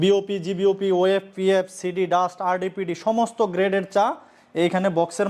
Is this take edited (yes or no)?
no